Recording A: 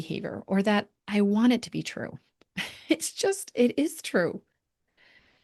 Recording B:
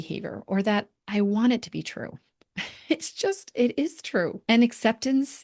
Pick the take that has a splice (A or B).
B